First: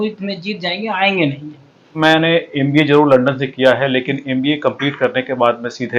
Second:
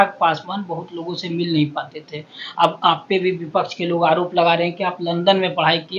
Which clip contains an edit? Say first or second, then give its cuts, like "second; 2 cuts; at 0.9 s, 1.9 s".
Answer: first; 1 cut; at 2.0 s